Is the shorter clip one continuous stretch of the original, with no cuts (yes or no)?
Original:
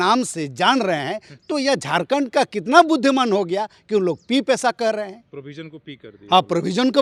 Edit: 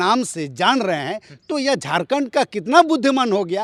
yes